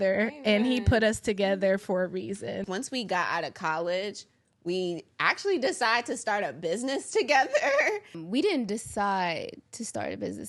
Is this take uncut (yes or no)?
no